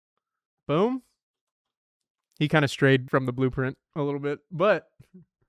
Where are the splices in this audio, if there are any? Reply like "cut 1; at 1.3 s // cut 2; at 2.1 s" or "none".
cut 1; at 3.0 s